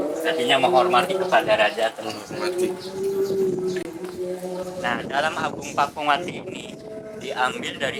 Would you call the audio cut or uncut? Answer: uncut